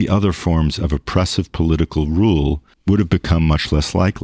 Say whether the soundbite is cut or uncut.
cut